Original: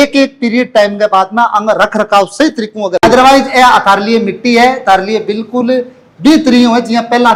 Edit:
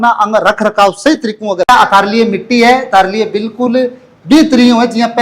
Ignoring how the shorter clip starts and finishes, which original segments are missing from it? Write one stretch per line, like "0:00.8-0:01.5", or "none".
0:03.0-0:03.6